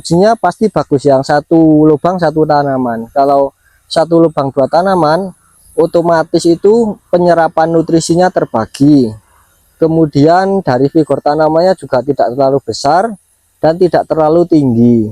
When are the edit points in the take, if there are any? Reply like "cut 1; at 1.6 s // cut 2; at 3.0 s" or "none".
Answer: none